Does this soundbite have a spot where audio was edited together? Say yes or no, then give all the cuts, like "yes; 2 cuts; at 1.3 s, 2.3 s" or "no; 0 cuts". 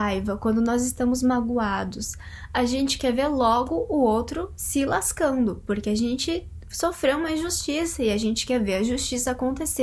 no; 0 cuts